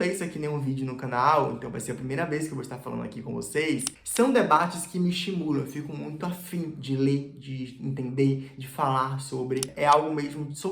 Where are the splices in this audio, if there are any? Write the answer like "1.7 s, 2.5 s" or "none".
3.9 s, 9.7 s